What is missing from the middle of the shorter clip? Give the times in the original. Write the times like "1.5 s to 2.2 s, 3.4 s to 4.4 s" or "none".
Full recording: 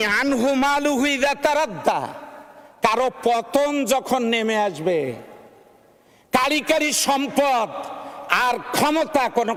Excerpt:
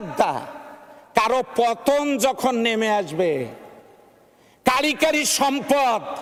none

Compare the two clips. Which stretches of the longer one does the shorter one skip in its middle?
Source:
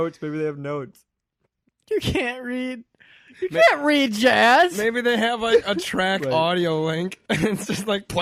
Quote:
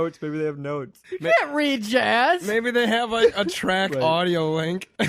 1.0 s to 3.3 s

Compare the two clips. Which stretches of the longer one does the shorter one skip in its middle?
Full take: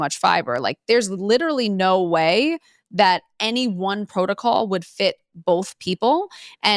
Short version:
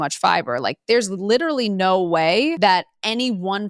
2.6 s to 2.9 s

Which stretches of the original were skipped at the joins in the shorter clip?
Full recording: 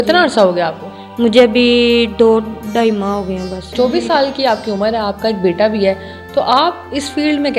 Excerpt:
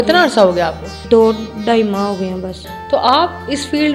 1.0 s to 2.1 s, 3.7 s to 6.0 s

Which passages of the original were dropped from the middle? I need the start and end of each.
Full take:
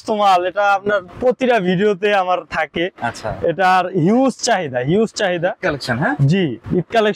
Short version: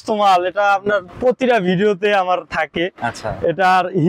none

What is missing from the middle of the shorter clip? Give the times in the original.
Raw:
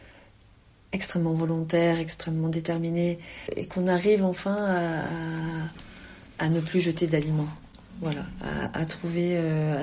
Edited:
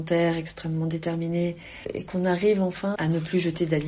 4.6 s to 6.4 s

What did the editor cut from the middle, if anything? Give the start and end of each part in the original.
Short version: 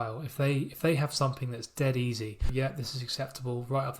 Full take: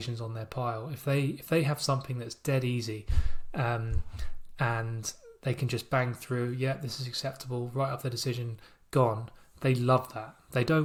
3.2 s to 6.6 s

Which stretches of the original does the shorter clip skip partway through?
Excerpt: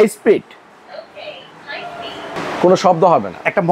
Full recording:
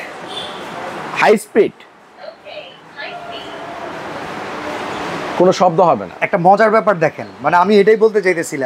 3.7 s to 5.1 s

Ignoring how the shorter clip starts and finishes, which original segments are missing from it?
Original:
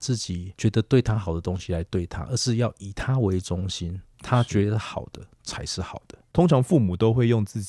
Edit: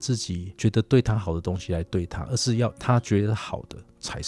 2.8 s to 4.2 s

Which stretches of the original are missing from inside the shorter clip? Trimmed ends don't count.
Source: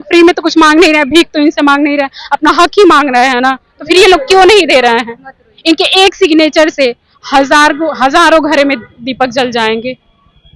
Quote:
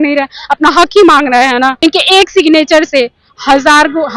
3.5 s to 5.6 s

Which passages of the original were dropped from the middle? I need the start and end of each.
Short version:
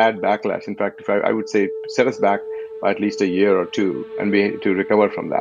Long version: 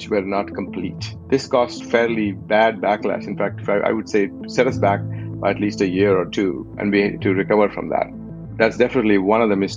none

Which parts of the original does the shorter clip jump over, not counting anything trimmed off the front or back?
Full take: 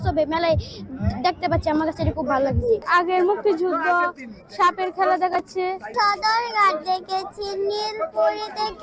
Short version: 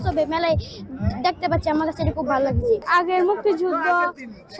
none

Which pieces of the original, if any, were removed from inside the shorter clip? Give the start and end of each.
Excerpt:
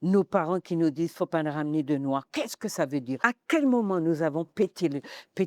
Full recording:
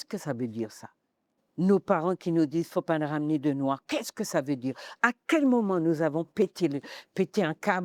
4.7 s to 5.0 s

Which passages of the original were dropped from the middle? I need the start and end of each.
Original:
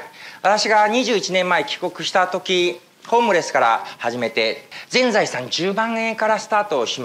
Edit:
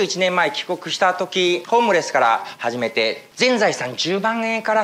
2.8 s to 3.0 s, 4.6 s to 4.8 s

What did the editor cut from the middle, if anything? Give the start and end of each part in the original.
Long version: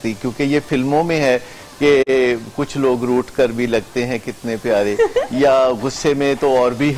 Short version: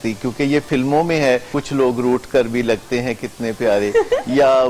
1.5 s to 2.6 s

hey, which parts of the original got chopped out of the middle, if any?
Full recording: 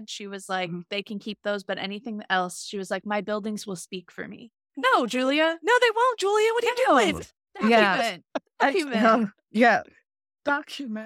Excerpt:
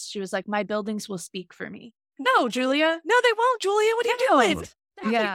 none

